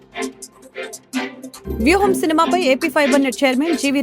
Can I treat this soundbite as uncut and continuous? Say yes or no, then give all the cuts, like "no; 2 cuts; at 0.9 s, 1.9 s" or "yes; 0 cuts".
no; 1 cut; at 1.5 s